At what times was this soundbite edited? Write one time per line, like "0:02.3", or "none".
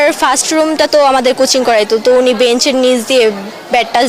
none